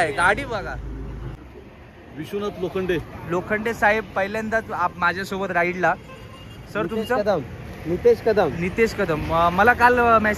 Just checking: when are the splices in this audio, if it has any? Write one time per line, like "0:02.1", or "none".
0:01.3